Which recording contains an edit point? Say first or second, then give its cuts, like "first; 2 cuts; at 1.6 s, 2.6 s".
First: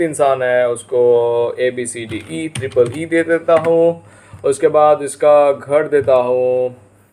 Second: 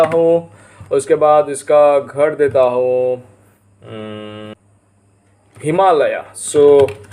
second; 1 cut; at 4.5 s